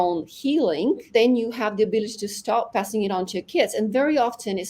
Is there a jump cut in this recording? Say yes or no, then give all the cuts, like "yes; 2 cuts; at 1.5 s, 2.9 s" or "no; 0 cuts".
yes; 2 cuts; at 1.1 s, 2.7 s